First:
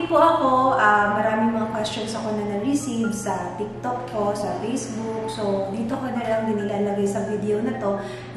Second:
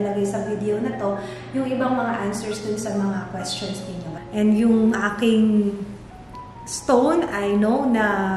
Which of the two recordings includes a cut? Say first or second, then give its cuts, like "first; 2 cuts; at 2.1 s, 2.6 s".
second; 1 cut; at 4.1 s